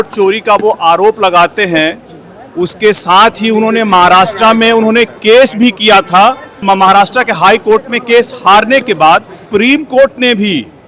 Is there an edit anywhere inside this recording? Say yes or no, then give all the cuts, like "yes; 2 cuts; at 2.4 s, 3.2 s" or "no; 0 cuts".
yes; 2 cuts; at 6.5 s, 9.5 s